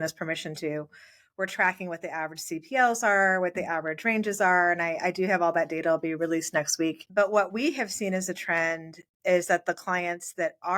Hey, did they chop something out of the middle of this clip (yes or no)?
yes